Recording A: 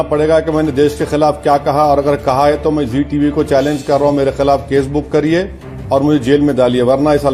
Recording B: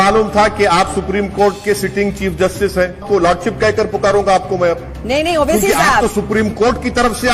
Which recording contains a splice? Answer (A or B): B